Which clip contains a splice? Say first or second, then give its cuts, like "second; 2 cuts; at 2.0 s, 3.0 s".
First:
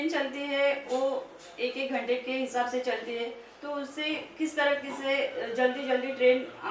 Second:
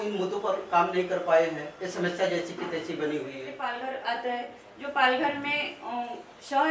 second; 1 cut; at 3.5 s